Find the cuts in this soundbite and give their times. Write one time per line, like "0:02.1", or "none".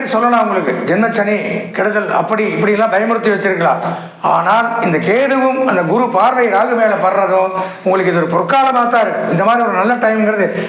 none